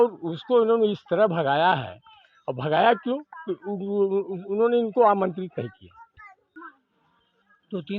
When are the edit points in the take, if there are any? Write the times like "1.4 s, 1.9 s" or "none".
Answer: 6.4 s